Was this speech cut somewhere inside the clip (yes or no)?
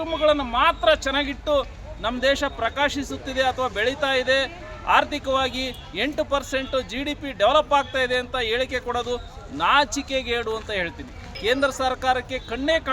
yes